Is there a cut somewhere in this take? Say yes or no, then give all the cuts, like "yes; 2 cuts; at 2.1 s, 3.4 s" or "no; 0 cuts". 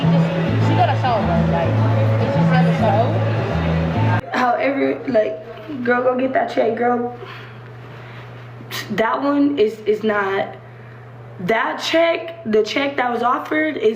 yes; 1 cut; at 4.2 s